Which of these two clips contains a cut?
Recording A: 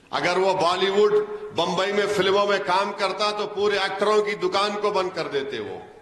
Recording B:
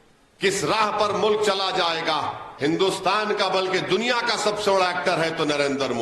B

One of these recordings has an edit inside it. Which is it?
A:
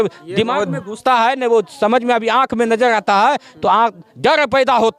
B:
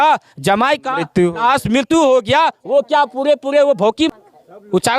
B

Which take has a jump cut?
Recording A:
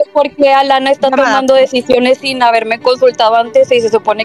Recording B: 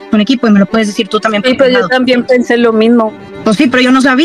B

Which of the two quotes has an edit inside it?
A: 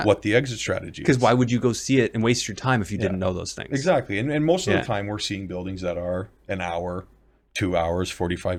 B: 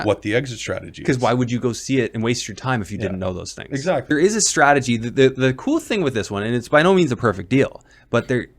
B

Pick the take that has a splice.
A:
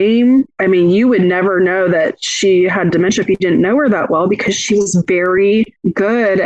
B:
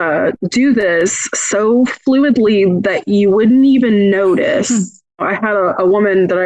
B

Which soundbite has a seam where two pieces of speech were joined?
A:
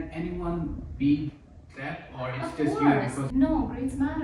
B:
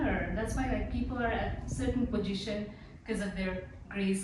A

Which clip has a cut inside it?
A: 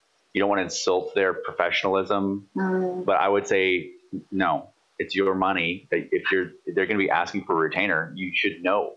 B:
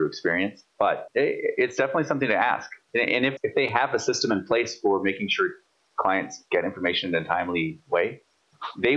B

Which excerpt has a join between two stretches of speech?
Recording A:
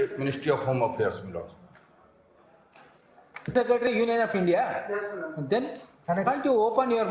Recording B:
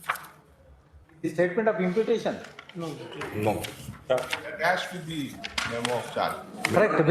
A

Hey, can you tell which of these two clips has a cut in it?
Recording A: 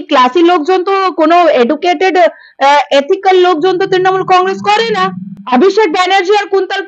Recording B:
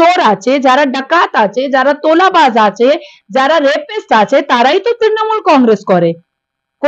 A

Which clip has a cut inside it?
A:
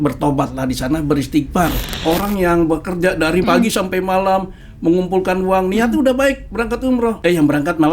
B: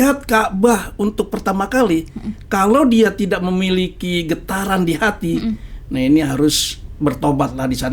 A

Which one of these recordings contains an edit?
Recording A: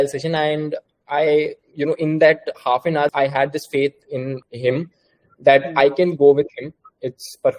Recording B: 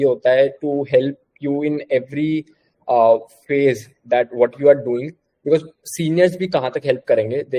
A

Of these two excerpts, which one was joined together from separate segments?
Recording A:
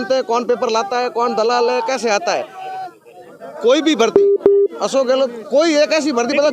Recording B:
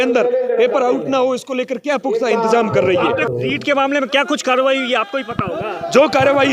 B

